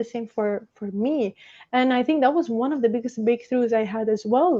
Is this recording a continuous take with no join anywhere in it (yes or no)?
yes